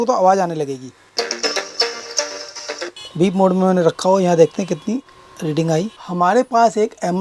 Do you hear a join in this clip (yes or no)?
yes